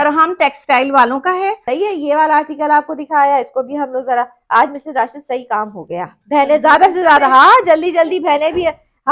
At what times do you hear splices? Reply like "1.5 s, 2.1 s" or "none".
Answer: 1.6 s